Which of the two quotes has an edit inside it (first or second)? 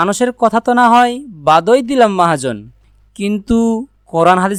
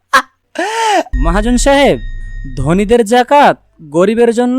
second